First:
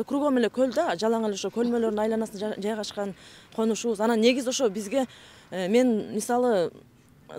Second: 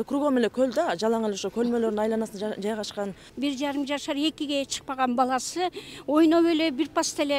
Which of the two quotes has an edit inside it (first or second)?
second